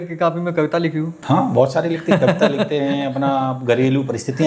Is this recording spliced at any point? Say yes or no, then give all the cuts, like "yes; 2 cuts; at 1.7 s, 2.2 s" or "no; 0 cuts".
yes; 1 cut; at 1.1 s